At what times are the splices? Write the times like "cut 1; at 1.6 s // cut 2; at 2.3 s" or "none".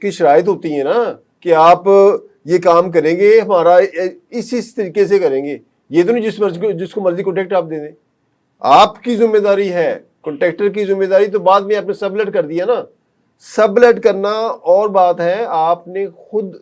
none

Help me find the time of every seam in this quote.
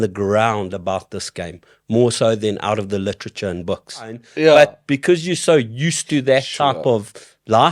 cut 1; at 4.2 s

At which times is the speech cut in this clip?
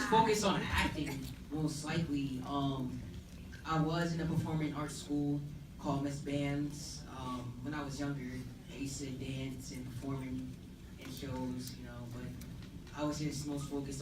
cut 1; at 4.6 s

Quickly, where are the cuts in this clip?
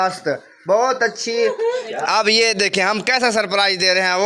cut 1; at 1.8 s

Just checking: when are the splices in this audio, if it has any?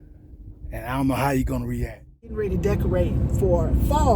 cut 1; at 2.3 s

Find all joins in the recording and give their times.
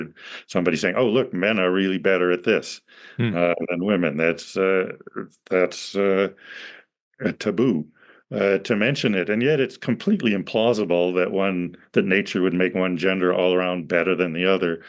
none

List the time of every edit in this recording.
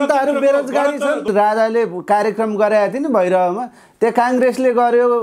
cut 1; at 1.3 s

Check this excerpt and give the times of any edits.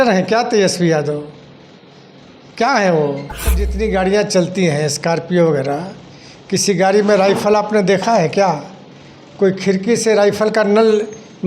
cut 1; at 3.6 s

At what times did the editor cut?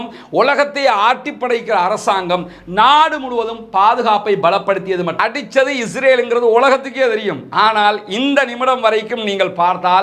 cut 1; at 5.1 s

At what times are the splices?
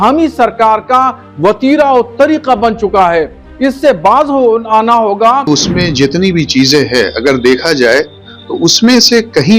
cut 1; at 5.5 s

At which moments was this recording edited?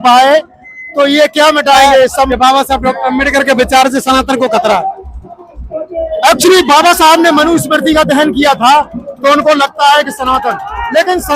cut 1; at 2.3 s

